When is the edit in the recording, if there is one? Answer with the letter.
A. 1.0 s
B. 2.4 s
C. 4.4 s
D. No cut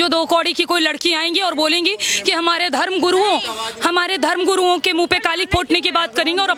D